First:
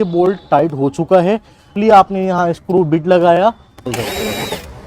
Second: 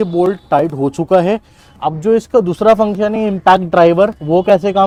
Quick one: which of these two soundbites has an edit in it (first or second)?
first